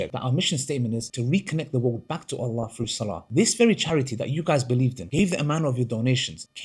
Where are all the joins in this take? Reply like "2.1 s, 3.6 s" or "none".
none